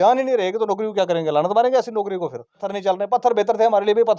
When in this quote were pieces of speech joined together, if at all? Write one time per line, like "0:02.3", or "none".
0:02.7